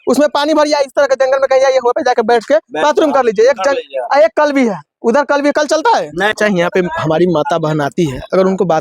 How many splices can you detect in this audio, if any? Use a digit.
1